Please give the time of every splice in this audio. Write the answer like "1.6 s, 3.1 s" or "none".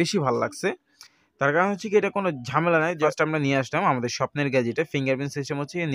3.0 s

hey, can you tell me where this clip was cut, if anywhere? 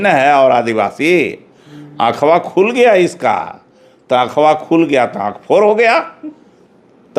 none

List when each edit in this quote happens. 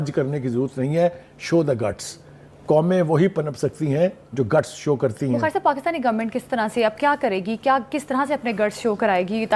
none

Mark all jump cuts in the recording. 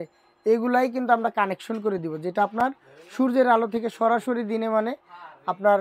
none

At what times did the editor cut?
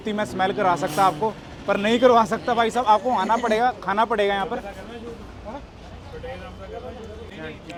none

